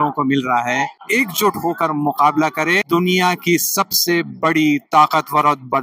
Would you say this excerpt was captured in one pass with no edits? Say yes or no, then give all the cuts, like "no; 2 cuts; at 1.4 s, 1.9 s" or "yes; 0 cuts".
no; 2 cuts; at 1.0 s, 2.8 s